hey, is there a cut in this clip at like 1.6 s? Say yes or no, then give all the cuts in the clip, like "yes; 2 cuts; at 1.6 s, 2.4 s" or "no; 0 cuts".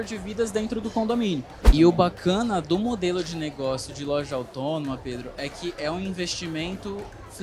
yes; 1 cut; at 1.6 s